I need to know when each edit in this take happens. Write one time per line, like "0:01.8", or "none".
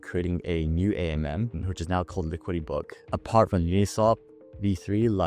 0:03.0